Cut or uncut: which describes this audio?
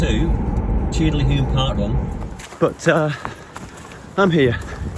cut